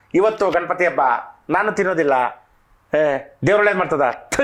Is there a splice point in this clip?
no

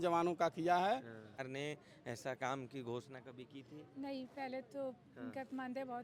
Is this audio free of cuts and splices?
no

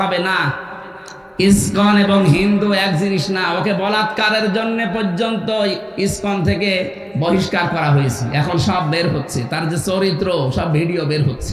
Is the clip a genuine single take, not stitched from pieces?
no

